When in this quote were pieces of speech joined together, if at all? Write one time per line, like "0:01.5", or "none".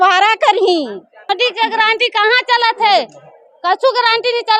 0:01.3

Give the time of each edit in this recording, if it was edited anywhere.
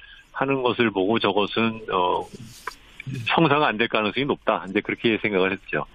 0:01.0

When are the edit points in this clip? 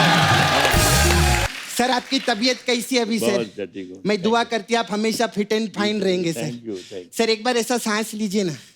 0:01.5

